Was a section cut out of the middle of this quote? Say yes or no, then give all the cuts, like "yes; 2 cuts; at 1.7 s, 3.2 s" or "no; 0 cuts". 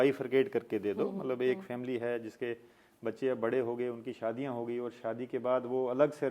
no; 0 cuts